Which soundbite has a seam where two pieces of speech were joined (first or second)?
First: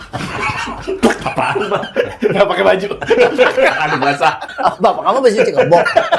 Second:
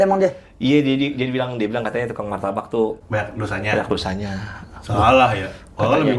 second